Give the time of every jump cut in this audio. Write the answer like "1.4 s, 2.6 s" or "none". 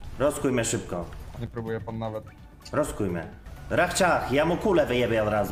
none